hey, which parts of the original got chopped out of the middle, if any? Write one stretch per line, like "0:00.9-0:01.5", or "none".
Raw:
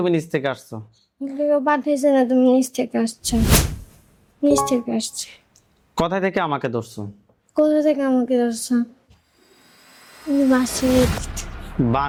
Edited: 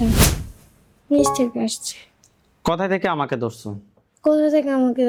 none